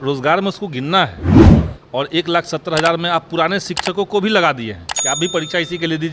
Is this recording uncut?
no; 2 cuts; at 1.2 s, 1.7 s

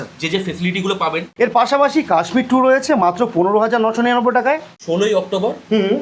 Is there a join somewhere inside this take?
yes; 2 cuts; at 1.2 s, 4.7 s

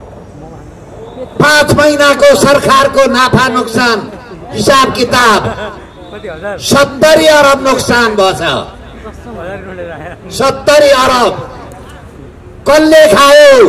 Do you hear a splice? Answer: no; 0 cuts

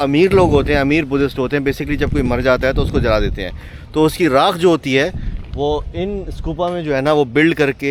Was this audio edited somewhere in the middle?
no; 0 cuts

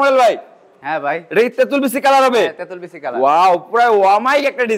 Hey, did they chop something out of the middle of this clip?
no; 0 cuts

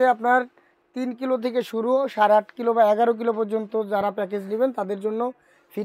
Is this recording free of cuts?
yes; 0 cuts

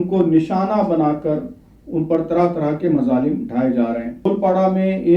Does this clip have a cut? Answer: yes; 1 cut; at 4.3 s

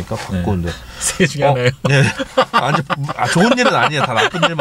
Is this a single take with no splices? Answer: yes; 0 cuts

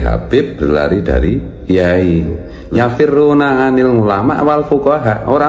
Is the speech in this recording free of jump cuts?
no; 1 cut; at 2.5 s

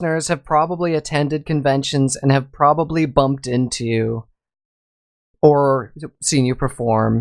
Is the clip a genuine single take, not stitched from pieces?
no; 1 cut; at 5.8 s

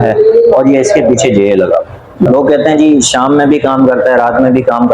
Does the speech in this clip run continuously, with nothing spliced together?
no; 1 cut; at 2.3 s

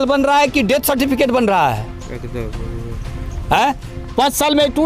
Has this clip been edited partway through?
no; 0 cuts

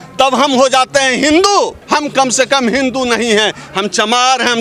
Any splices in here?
yes; 1 cut; at 1.8 s

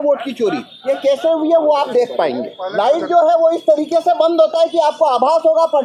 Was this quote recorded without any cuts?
no; 1 cut; at 2.6 s

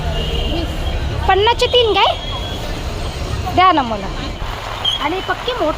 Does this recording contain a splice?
yes; 1 cut; at 4.4 s

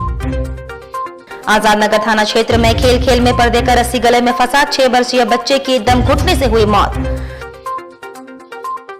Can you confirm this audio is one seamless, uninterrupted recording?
no; 1 cut; at 1.0 s

